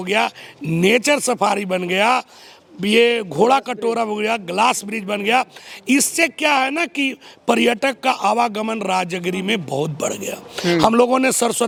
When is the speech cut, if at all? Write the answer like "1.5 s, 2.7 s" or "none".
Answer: none